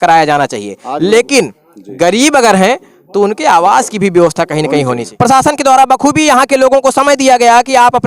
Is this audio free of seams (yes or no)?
no